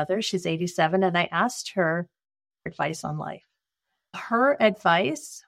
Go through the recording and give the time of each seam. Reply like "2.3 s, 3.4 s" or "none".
2.7 s, 4.1 s